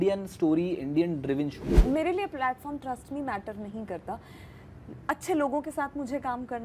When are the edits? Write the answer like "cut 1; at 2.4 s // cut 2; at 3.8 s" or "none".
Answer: cut 1; at 1.7 s